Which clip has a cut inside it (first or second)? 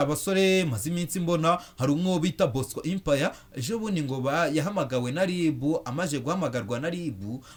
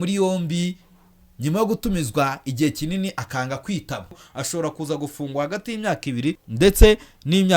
second